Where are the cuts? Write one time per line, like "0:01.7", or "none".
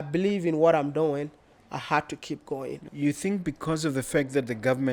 0:02.8